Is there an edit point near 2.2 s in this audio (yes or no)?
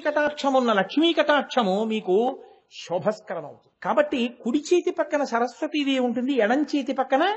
no